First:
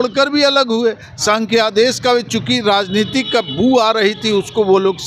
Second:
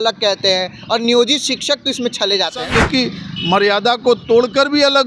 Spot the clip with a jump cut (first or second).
second